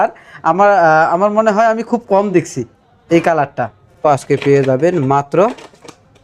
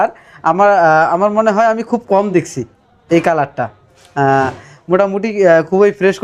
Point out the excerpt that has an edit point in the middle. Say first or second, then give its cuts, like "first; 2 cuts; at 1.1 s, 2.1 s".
first; 1 cut; at 4.0 s